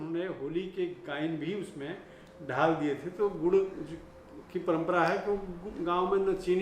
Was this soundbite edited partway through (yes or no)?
no